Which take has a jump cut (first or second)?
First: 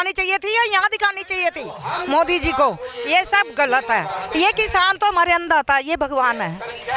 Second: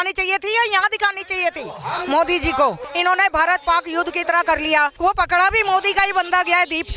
second